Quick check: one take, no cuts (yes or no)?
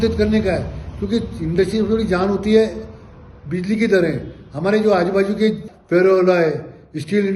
no